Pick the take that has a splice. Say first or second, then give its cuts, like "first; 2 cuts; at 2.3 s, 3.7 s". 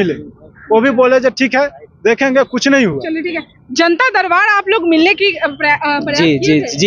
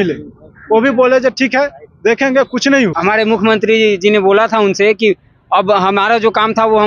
second; 1 cut; at 3.0 s